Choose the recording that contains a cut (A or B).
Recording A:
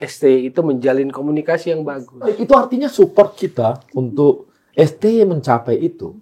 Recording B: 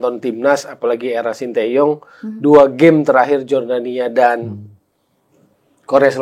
A